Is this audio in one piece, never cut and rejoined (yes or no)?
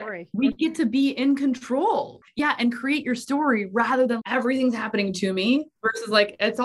no